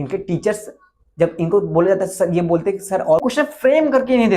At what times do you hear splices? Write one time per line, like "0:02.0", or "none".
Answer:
0:03.2